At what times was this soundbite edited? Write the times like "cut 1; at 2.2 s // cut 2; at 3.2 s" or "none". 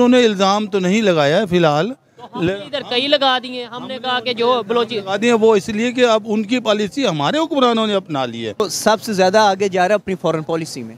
cut 1; at 8.6 s